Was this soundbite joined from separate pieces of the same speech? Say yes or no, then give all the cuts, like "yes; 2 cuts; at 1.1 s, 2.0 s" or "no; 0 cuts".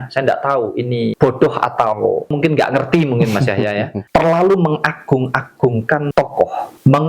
yes; 4 cuts; at 1.1 s, 2.3 s, 4.0 s, 6.2 s